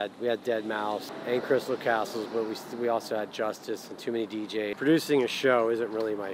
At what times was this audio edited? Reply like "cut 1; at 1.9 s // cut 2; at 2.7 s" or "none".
cut 1; at 1.1 s // cut 2; at 4.7 s